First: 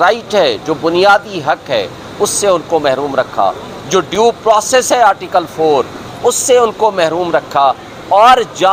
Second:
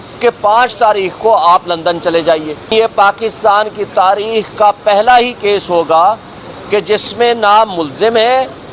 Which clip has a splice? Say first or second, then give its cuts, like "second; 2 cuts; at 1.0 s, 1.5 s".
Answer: second; 1 cut; at 2.7 s